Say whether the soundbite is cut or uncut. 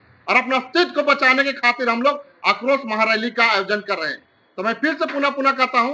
uncut